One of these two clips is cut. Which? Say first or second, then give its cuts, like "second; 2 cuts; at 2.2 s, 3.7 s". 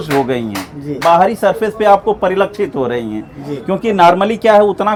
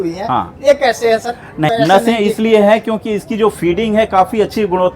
second; 1 cut; at 1.7 s